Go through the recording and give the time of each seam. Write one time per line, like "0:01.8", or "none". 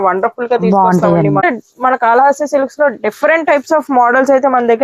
0:01.4